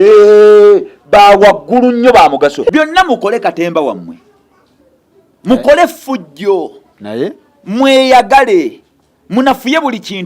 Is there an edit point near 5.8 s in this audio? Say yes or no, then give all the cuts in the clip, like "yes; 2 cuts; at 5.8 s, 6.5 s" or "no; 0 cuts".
no; 1 cut; at 2.6 s